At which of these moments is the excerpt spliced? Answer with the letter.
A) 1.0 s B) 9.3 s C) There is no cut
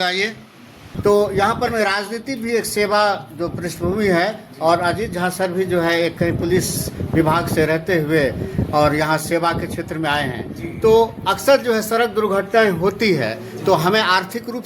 A